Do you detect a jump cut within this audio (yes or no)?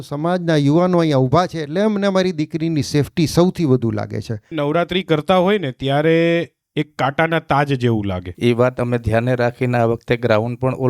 yes